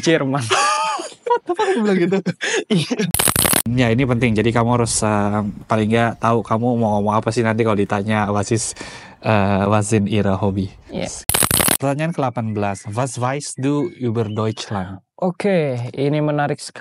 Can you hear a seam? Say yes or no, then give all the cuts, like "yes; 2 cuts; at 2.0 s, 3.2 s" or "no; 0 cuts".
yes; 2 cuts; at 3.1 s, 11.3 s